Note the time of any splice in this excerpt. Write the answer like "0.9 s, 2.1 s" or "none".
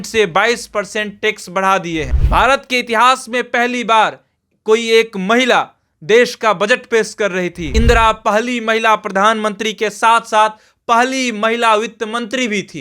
2.2 s, 7.6 s